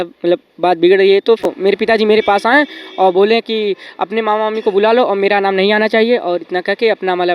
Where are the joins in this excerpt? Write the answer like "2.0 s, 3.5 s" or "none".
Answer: 1.5 s